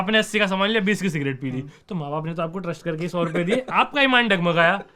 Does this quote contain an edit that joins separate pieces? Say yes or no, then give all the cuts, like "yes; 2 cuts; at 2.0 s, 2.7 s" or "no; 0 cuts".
no; 0 cuts